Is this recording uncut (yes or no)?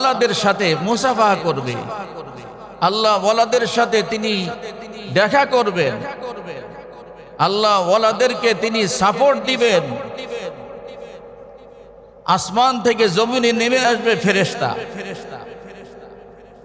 yes